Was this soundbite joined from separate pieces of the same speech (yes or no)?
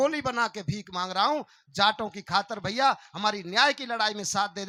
no